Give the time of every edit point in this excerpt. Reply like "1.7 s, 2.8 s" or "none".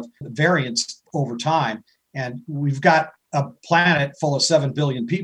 none